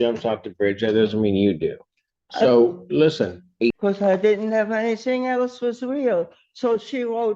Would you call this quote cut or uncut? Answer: cut